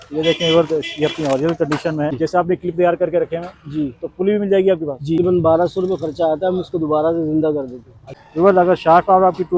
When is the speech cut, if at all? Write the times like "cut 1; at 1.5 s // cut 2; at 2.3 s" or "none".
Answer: cut 1; at 2.2 s // cut 2; at 5.2 s // cut 3; at 8.0 s